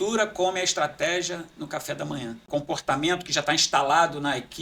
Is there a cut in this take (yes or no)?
yes